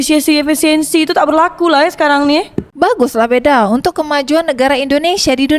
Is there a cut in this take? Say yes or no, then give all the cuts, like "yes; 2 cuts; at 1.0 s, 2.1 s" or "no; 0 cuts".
yes; 1 cut; at 2.7 s